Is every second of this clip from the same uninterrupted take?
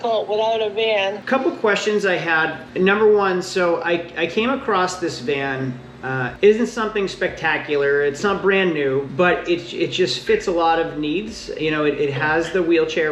yes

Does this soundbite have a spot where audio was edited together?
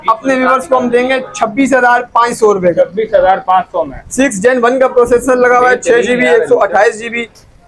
no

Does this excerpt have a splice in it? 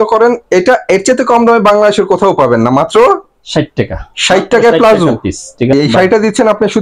yes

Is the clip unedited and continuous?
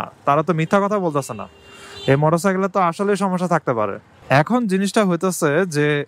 yes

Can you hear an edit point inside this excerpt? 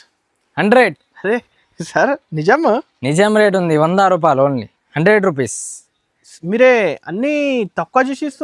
no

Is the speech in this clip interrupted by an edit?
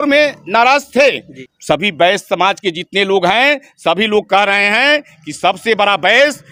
no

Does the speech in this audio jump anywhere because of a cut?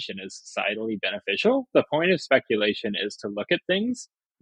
no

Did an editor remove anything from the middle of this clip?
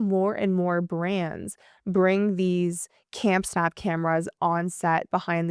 no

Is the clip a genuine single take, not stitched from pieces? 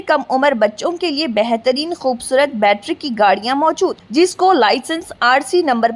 yes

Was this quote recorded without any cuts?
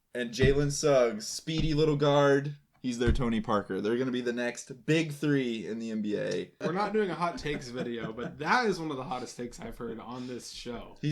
no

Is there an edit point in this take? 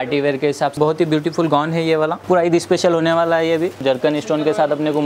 yes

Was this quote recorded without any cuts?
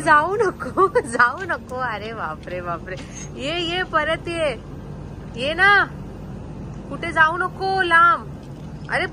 yes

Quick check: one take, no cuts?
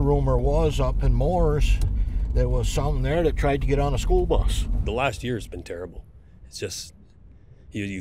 no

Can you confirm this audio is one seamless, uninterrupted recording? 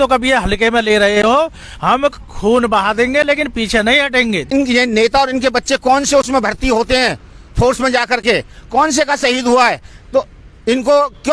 no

